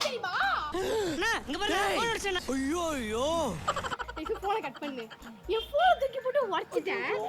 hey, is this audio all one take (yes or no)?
no